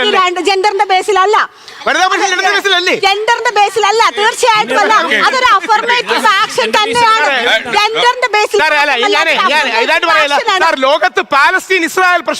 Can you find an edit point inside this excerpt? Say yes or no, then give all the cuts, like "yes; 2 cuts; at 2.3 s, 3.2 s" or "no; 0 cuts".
yes; 1 cut; at 1.9 s